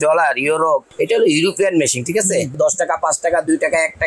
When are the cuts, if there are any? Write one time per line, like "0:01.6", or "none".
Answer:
0:00.9
0:02.6